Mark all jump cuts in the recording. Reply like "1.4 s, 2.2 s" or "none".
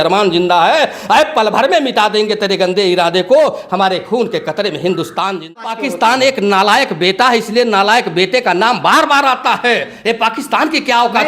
5.6 s